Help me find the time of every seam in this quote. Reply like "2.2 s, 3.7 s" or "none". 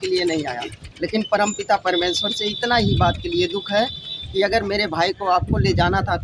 none